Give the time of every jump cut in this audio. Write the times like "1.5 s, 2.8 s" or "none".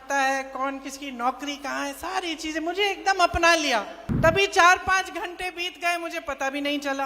4.0 s